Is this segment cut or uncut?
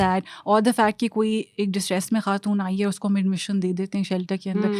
uncut